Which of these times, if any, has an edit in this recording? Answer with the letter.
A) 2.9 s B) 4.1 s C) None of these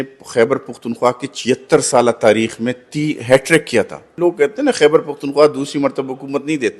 B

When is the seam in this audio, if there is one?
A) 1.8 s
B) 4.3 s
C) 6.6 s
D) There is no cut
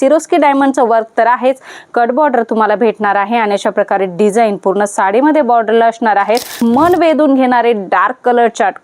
C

